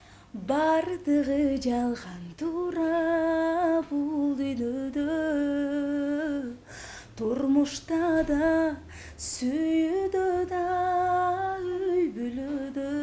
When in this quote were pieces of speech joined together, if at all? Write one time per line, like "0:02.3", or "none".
none